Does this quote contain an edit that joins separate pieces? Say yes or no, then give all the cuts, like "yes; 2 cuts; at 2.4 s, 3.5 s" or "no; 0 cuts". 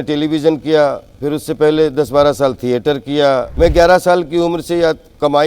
yes; 1 cut; at 3.5 s